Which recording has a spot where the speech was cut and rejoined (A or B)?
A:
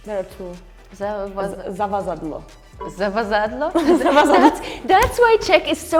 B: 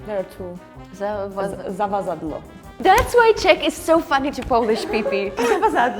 B